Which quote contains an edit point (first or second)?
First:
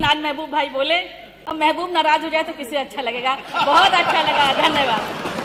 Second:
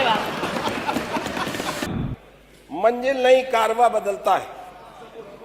second